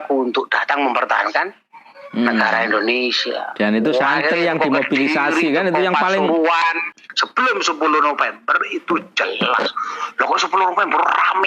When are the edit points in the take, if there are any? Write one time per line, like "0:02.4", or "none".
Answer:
0:06.9